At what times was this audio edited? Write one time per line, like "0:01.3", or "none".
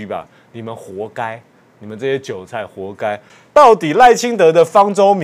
0:03.3